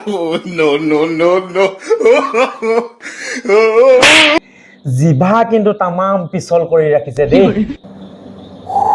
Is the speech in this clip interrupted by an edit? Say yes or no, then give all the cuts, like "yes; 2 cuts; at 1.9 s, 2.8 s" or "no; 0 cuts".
yes; 1 cut; at 4.4 s